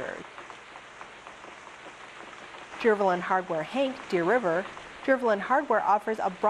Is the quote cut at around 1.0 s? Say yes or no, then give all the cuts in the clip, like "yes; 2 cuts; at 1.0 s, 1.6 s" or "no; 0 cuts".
no; 1 cut; at 2.8 s